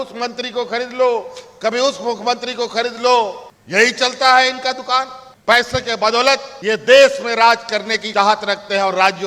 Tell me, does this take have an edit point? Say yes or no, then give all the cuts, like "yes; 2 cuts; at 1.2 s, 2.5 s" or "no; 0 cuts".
yes; 2 cuts; at 6.5 s, 8.0 s